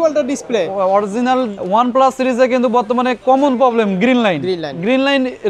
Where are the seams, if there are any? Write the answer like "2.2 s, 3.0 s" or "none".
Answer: 1.6 s